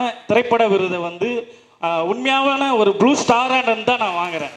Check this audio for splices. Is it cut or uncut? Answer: uncut